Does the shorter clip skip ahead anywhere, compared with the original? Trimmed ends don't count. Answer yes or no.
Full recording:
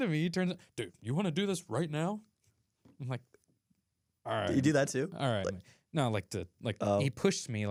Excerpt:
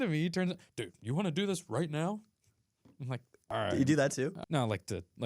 yes